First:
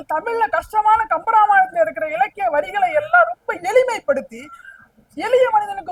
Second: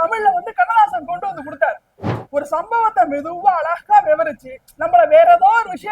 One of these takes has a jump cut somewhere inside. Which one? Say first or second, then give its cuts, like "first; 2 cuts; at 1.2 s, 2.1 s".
second; 1 cut; at 2.1 s